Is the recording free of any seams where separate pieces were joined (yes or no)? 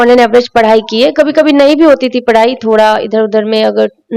yes